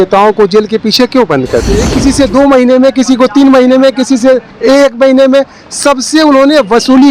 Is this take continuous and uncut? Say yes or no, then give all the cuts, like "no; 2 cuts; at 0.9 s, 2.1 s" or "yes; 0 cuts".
no; 1 cut; at 1.8 s